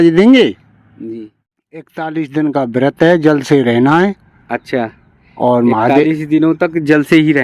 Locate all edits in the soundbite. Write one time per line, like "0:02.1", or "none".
0:01.4

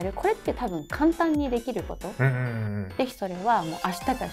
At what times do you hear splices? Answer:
0:02.9

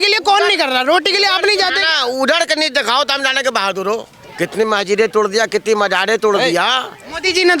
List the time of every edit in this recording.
0:04.2

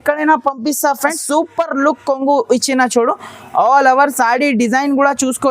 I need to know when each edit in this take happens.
0:01.2

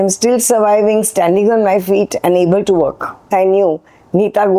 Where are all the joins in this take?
0:03.3

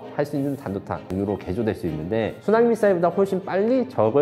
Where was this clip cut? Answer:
0:01.1
0:02.4

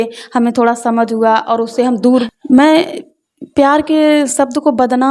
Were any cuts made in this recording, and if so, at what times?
0:02.2

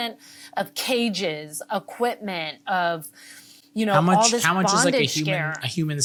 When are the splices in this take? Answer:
none

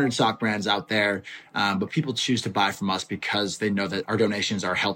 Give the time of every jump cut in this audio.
0:04.0

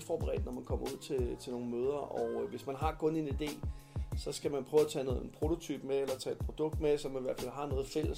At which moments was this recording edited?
none

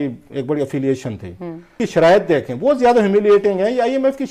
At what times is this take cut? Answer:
0:01.8

